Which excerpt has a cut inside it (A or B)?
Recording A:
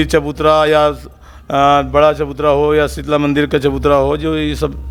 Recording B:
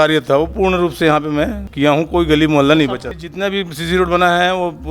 B